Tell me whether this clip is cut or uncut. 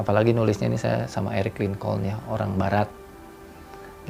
uncut